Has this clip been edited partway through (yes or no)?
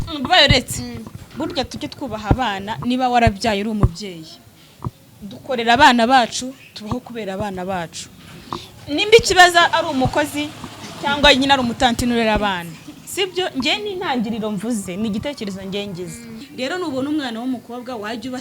yes